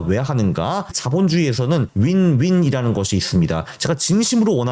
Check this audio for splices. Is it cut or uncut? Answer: cut